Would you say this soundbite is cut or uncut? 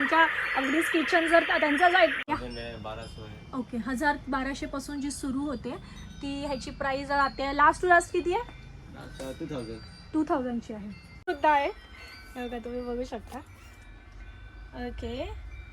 cut